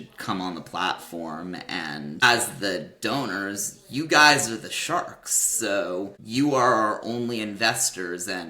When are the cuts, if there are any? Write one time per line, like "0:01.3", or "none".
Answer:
0:02.2
0:06.2